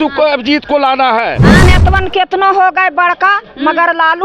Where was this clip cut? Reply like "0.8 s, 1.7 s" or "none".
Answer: 1.6 s